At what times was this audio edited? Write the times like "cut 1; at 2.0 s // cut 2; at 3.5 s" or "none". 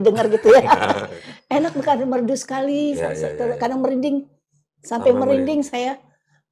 none